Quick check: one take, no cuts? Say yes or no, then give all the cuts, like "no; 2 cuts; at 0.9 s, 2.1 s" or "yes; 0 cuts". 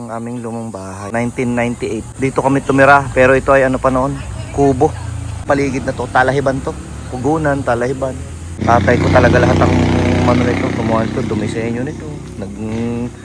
no; 4 cuts; at 1.0 s, 2.1 s, 5.4 s, 8.6 s